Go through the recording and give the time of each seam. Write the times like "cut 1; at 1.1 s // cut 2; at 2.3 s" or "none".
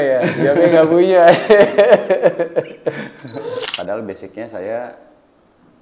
cut 1; at 3.7 s